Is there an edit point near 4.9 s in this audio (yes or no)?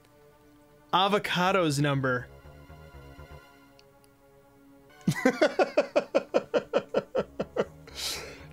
yes